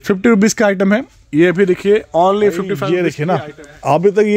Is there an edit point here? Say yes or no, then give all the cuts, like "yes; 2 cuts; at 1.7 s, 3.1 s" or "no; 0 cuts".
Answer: yes; 1 cut; at 3.0 s